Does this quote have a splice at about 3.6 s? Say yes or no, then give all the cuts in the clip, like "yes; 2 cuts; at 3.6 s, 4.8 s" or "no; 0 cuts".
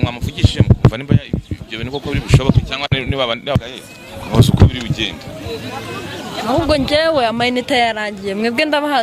yes; 1 cut; at 3.6 s